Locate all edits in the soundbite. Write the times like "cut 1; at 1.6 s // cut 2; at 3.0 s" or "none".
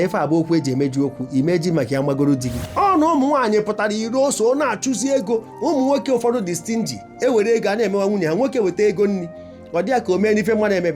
cut 1; at 2.6 s

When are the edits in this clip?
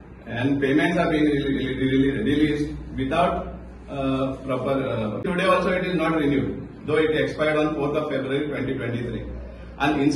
cut 1; at 5.3 s

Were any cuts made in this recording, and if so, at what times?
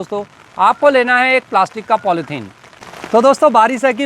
none

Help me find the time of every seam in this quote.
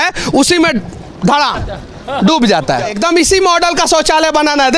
cut 1; at 2.9 s

